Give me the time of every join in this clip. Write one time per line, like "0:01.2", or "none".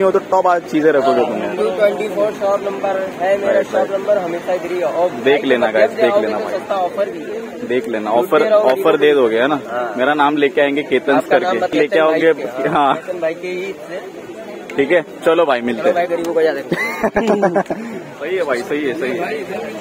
0:11.7
0:18.1